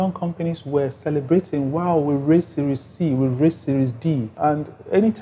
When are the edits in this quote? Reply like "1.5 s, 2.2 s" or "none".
4.3 s